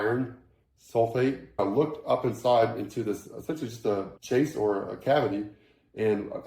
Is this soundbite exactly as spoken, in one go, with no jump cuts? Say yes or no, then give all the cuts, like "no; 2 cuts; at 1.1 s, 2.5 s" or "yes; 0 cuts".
no; 2 cuts; at 1.6 s, 4.1 s